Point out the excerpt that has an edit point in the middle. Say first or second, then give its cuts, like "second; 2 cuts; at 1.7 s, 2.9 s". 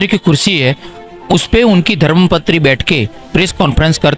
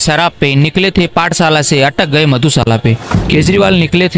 second; 1 cut; at 3.1 s